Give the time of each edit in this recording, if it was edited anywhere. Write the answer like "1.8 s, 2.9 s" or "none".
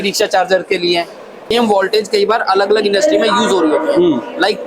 1.5 s